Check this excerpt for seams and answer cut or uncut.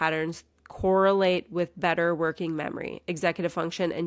uncut